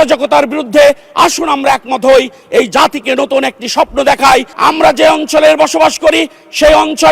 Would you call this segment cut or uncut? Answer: cut